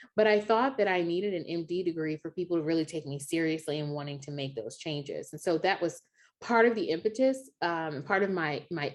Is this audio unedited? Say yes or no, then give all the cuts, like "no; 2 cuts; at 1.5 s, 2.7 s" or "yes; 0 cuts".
yes; 0 cuts